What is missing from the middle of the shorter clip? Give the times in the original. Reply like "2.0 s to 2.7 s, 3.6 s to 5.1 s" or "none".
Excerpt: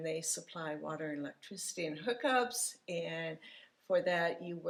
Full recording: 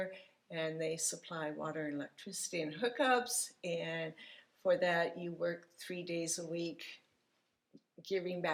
none